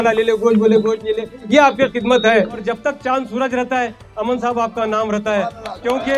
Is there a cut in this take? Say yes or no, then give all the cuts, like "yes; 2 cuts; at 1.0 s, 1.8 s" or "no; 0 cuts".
yes; 1 cut; at 2.6 s